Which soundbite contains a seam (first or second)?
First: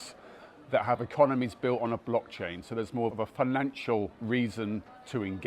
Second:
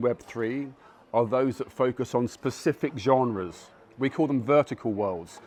first